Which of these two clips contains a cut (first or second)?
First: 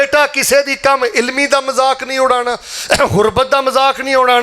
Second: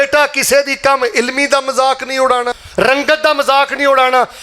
second